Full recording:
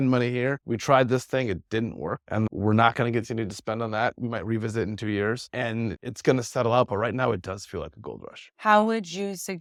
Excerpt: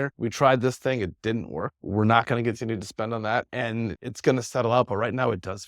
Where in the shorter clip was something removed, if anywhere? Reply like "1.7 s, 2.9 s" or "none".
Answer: 1.8 s, 3.5 s